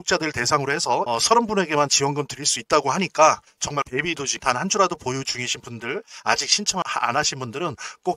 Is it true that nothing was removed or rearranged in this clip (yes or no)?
yes